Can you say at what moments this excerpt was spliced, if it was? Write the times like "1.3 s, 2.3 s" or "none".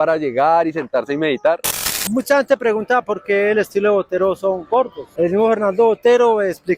1.8 s, 5.1 s